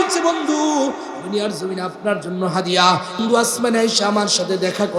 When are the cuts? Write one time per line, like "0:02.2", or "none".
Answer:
0:03.2